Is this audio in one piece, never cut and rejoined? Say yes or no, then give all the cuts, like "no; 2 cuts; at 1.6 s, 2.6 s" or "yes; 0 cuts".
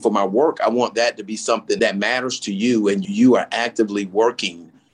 no; 2 cuts; at 1.8 s, 3.0 s